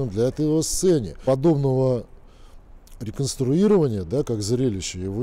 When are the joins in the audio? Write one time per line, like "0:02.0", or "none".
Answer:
0:01.1